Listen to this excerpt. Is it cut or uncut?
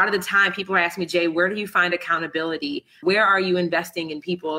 cut